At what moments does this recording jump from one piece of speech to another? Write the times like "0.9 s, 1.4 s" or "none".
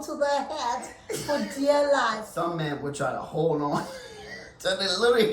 2.2 s